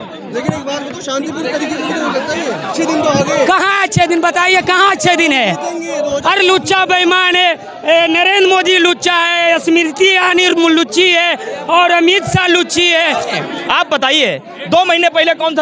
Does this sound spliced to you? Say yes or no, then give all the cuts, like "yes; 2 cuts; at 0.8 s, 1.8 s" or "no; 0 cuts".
yes; 2 cuts; at 2.7 s, 13.4 s